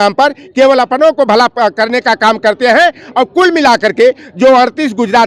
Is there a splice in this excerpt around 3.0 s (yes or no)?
no